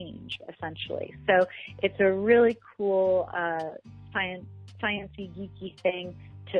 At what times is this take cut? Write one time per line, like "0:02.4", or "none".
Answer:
0:01.1